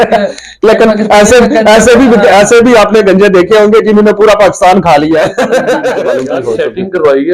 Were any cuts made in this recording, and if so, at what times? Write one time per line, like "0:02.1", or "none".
0:06.2